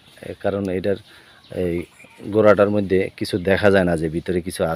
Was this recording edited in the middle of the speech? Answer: no; 0 cuts

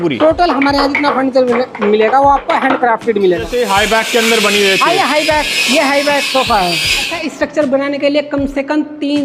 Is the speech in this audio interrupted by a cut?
yes; 2 cuts; at 3.5 s, 7.2 s

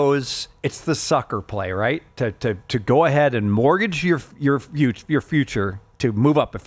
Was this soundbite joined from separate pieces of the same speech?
no; 0 cuts

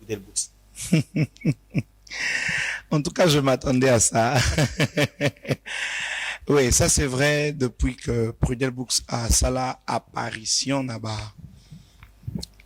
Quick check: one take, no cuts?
yes; 0 cuts

